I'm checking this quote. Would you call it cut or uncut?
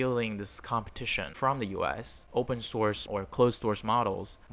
cut